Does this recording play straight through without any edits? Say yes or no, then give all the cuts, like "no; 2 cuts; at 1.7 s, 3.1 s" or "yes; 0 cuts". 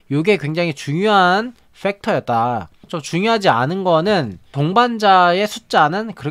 no; 1 cut; at 2.9 s